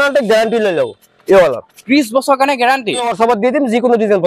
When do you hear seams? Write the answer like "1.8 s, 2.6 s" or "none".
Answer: 3.0 s